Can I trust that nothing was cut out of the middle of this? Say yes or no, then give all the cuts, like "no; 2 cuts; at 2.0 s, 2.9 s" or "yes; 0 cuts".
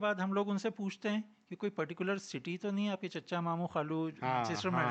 yes; 0 cuts